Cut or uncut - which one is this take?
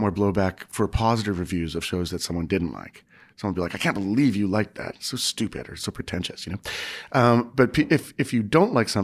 uncut